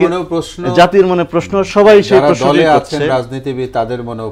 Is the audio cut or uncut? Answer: uncut